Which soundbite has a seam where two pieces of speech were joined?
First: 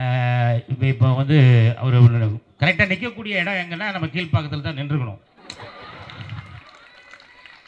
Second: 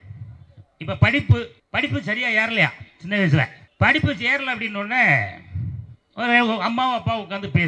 second; 2 cuts; at 1.6 s, 3.6 s

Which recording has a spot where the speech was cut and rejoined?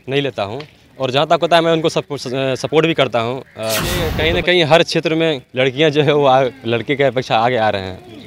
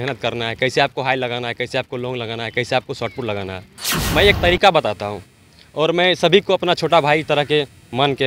first; 1 cut; at 4.1 s

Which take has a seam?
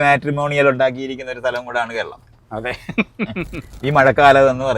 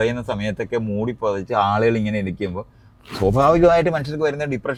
first; 1 cut; at 3.6 s

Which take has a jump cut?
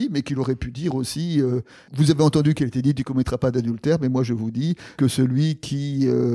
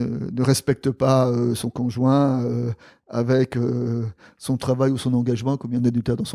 first; 1 cut; at 1.8 s

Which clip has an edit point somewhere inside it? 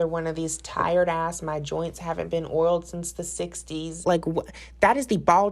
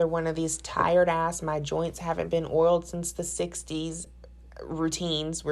first; 1 cut; at 3.9 s

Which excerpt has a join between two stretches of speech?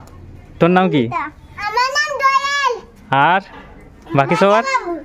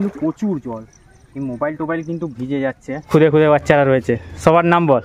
second; 1 cut; at 3.1 s

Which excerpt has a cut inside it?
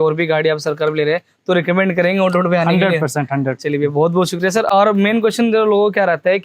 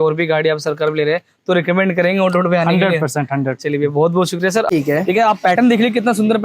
second; 1 cut; at 4.7 s

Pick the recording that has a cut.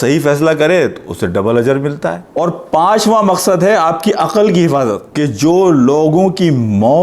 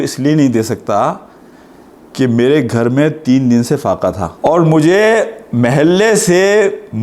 first; 2 cuts; at 2.3 s, 5.0 s

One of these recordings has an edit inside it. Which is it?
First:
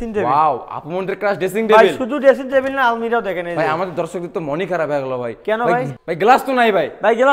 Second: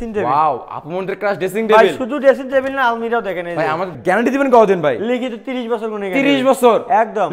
second; 1 cut; at 3.9 s

